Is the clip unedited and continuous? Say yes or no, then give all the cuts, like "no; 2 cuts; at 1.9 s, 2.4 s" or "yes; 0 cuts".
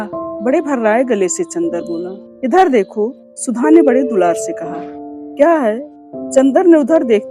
no; 1 cut; at 2.2 s